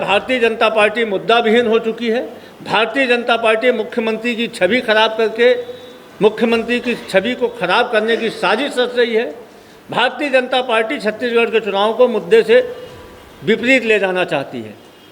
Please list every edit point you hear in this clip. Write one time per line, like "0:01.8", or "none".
none